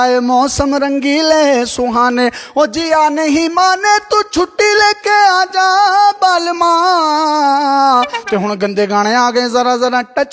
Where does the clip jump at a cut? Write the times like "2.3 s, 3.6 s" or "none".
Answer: none